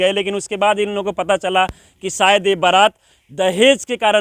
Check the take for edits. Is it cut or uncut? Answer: uncut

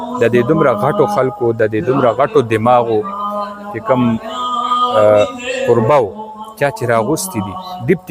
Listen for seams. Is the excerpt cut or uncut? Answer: uncut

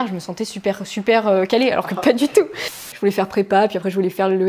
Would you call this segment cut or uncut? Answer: cut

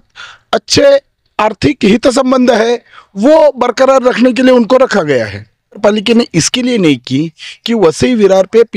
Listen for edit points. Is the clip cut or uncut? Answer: cut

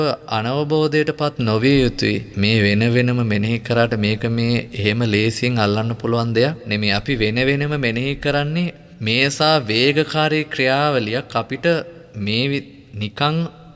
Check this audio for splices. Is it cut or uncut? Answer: cut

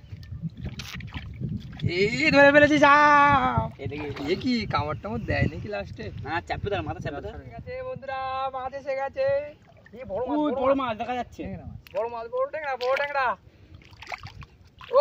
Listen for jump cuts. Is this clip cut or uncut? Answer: cut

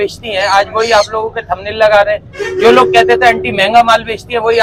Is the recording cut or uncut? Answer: uncut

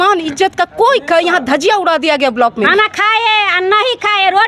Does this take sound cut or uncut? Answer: cut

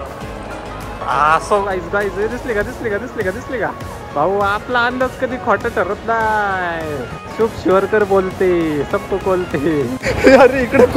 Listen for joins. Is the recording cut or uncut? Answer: cut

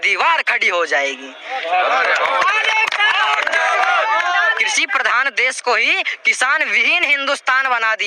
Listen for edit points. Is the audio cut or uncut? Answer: cut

